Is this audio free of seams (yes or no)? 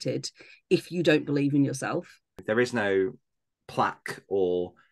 no